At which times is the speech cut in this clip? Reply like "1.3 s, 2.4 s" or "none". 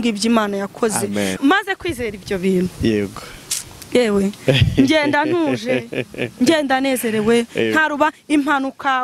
1.4 s